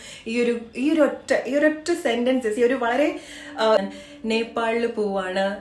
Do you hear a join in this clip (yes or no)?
yes